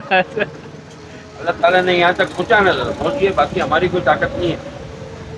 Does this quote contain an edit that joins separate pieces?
no; 0 cuts

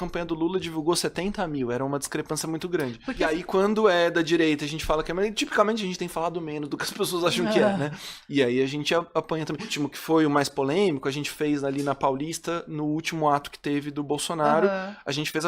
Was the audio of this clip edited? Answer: yes; 2 cuts; at 3.4 s, 9.7 s

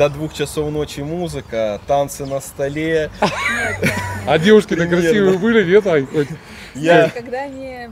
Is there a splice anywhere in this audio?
no; 0 cuts

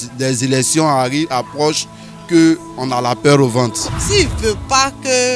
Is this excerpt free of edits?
no; 1 cut; at 3.9 s

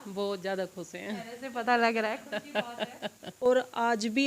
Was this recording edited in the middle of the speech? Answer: yes; 1 cut; at 3.4 s

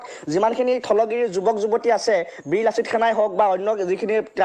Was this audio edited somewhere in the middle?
no; 0 cuts

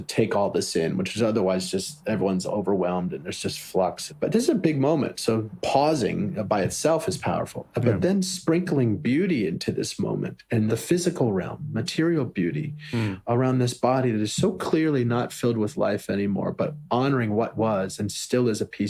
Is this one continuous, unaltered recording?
yes; 0 cuts

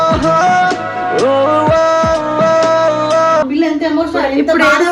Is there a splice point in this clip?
yes; 1 cut; at 3.5 s

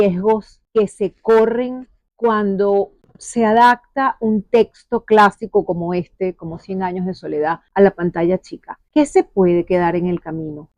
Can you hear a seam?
no; 0 cuts

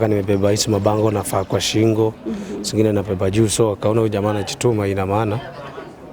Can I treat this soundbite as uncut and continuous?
yes; 0 cuts

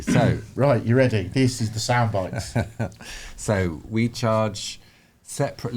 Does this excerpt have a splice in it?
no; 0 cuts

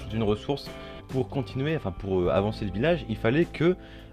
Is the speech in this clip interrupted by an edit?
no; 0 cuts

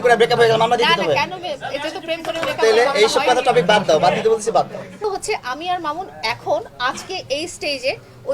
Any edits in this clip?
yes; 1 cut; at 5.0 s

